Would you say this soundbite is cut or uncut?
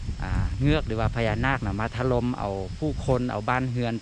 uncut